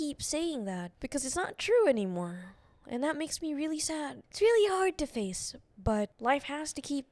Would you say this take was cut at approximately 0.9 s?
yes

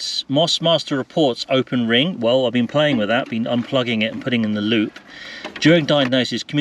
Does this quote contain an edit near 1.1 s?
no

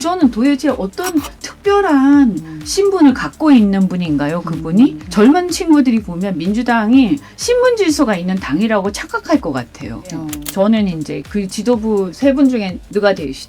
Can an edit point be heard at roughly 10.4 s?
yes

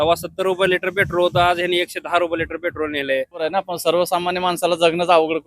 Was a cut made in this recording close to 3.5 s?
yes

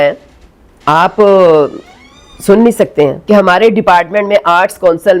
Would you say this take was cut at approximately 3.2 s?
yes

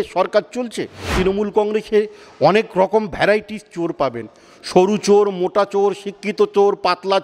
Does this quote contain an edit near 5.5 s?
no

